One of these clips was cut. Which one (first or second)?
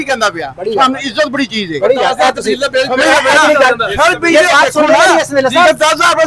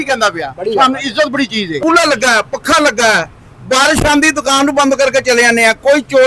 second